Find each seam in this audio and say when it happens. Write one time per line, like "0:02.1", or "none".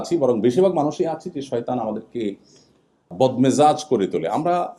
0:03.1